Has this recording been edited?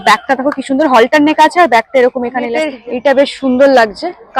yes; 1 cut; at 2.7 s

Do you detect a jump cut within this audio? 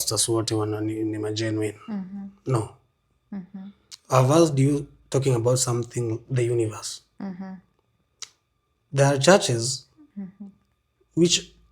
no; 0 cuts

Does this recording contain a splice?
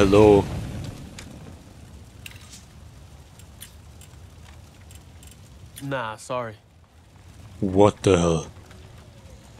no; 0 cuts

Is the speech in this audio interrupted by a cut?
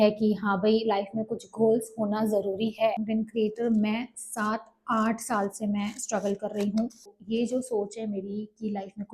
yes; 2 cuts; at 3.0 s, 7.2 s

